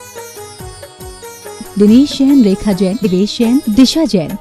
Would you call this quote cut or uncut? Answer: cut